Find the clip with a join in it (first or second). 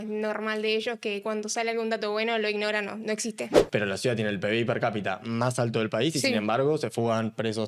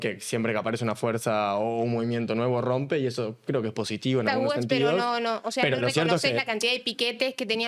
first